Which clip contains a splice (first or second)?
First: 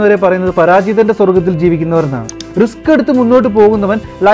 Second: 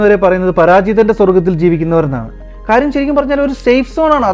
first